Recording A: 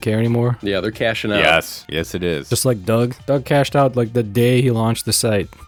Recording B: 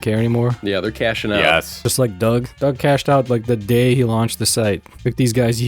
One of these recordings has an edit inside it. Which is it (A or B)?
B